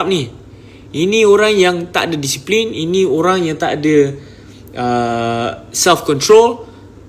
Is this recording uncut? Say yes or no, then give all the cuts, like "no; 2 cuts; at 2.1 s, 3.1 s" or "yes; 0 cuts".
yes; 0 cuts